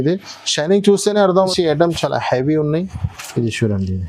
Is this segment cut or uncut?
cut